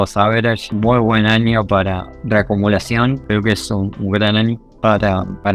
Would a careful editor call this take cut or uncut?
cut